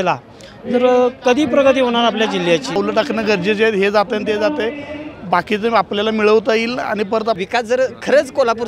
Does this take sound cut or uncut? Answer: cut